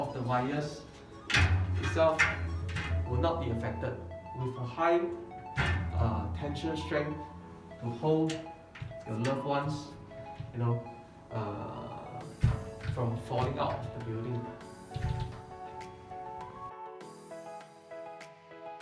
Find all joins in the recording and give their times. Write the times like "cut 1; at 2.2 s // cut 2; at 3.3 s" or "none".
none